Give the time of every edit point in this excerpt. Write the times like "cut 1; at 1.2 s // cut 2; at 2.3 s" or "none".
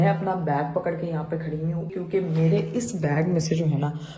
cut 1; at 1.9 s